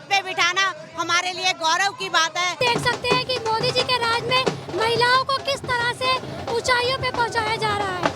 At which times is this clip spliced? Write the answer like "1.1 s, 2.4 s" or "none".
2.6 s